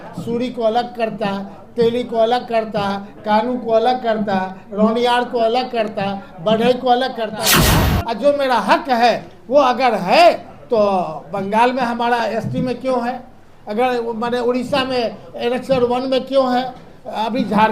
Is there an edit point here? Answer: yes; 1 cut; at 7.7 s

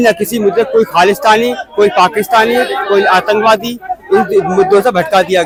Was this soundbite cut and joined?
no; 0 cuts

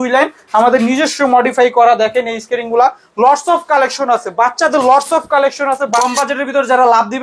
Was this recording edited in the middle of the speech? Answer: yes; 1 cut; at 5.9 s

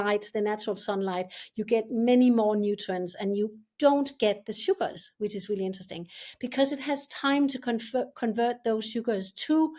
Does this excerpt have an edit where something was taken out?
no; 0 cuts

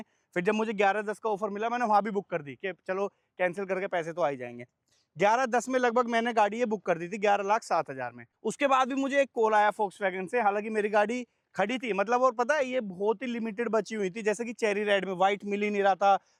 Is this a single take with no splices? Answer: yes; 0 cuts

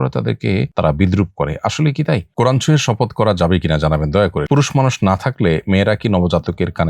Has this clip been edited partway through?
yes; 2 cuts; at 2.3 s, 4.4 s

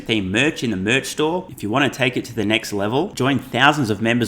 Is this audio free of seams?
yes; 0 cuts

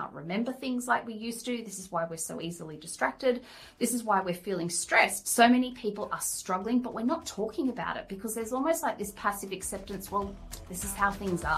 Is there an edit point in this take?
yes; 1 cut; at 5.2 s

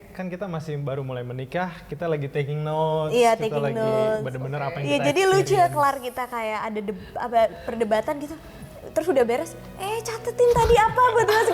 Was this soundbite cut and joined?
no; 0 cuts

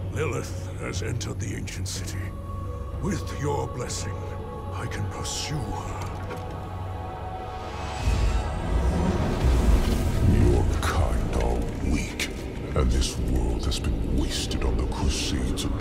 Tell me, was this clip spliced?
no; 0 cuts

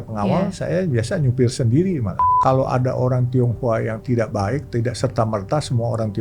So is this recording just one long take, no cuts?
no; 1 cut; at 2.2 s

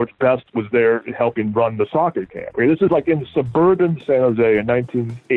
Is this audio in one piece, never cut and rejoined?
yes; 0 cuts

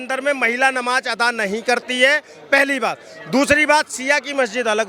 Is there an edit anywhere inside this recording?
no; 0 cuts

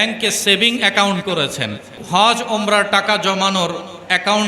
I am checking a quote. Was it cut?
yes; 1 cut; at 2.0 s

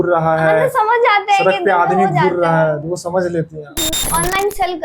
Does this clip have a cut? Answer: yes; 1 cut; at 3.9 s

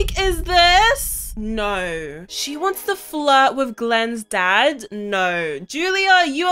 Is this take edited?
no; 0 cuts

